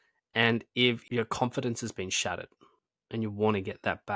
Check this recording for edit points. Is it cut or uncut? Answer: cut